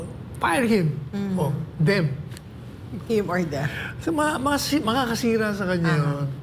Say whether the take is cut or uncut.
uncut